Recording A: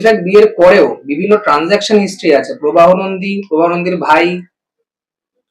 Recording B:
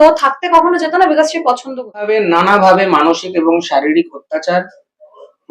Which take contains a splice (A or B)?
B